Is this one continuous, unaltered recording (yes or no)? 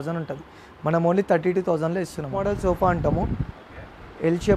no